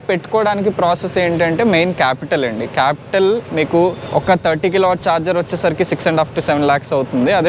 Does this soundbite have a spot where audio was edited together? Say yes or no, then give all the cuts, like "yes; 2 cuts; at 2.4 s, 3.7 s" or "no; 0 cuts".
no; 0 cuts